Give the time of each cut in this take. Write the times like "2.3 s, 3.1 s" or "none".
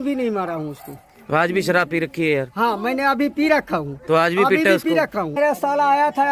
5.3 s